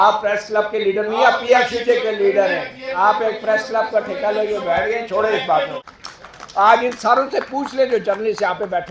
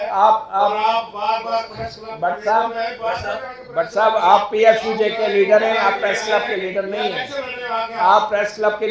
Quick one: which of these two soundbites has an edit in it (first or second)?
first